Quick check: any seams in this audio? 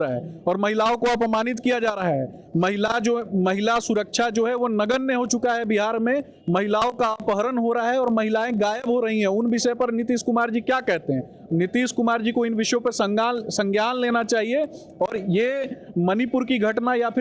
no; 0 cuts

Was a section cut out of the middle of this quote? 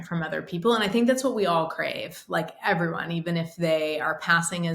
no; 0 cuts

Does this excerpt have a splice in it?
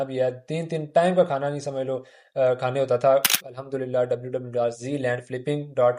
yes; 1 cut; at 3.5 s

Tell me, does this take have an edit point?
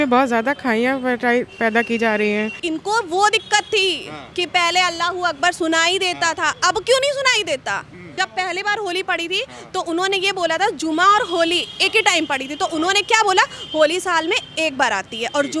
yes; 2 cuts; at 2.6 s, 8.1 s

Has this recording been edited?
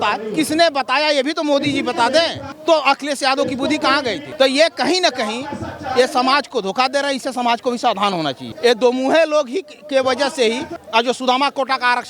yes; 4 cuts; at 2.4 s, 4.3 s, 8.4 s, 10.7 s

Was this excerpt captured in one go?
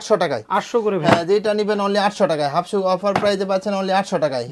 yes; 0 cuts

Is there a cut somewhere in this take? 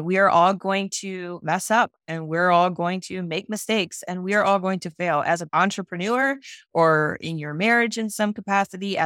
yes; 1 cut; at 5.5 s

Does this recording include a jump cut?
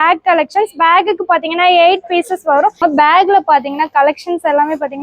yes; 1 cut; at 2.8 s

